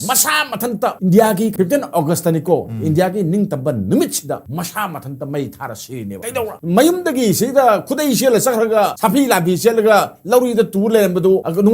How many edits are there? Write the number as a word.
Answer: two